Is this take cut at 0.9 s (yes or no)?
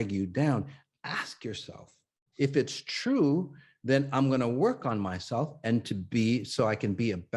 no